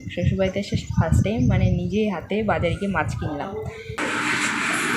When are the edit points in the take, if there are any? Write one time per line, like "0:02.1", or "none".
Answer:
0:04.0